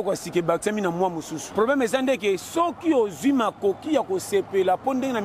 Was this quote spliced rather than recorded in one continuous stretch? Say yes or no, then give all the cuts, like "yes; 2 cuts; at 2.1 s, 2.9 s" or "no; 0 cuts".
yes; 1 cut; at 1.4 s